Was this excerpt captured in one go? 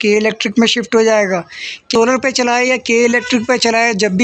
no; 1 cut; at 1.9 s

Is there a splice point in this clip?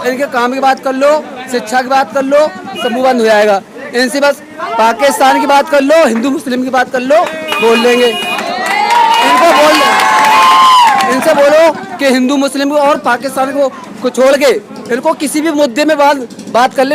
no; 0 cuts

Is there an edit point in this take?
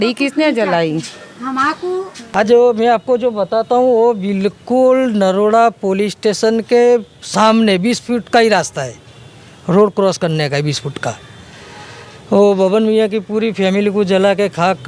yes; 1 cut; at 2.2 s

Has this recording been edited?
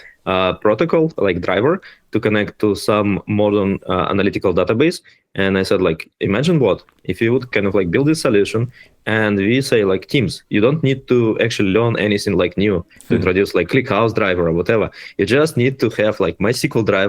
no; 0 cuts

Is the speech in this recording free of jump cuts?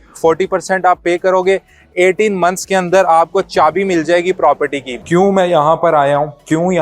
no; 1 cut; at 4.9 s

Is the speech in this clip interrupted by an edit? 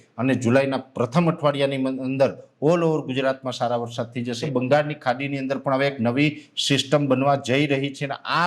yes; 1 cut; at 4.5 s

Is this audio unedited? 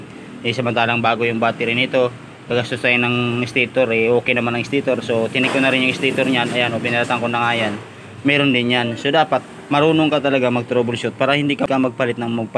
no; 1 cut; at 11.6 s

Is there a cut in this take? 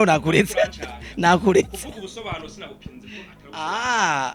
no; 0 cuts

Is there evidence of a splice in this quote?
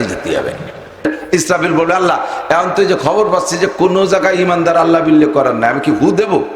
yes; 1 cut; at 1.0 s

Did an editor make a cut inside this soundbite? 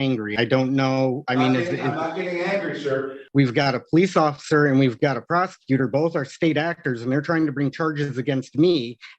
yes; 1 cut; at 3.2 s

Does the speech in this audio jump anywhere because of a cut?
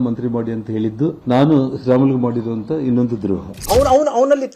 yes; 2 cuts; at 1.2 s, 3.5 s

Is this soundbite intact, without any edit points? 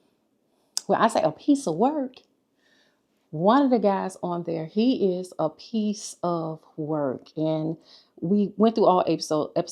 yes; 0 cuts

